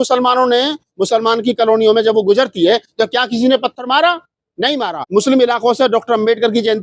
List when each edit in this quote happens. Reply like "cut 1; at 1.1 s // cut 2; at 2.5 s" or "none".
cut 1; at 5.0 s